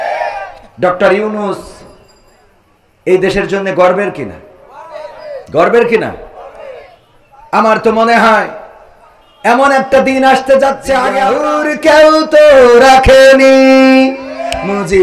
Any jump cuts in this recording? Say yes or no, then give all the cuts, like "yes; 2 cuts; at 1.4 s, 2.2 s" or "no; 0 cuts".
yes; 1 cut; at 11.2 s